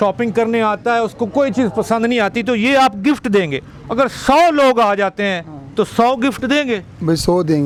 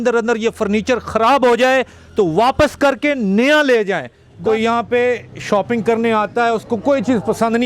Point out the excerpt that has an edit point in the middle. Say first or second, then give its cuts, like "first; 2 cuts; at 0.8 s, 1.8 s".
second; 1 cut; at 4.3 s